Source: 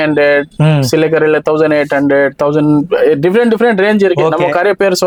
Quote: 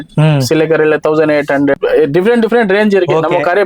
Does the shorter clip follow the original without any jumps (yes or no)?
no